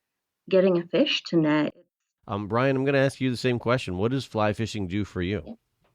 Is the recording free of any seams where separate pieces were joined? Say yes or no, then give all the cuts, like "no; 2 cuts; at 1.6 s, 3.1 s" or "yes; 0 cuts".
no; 1 cut; at 1.7 s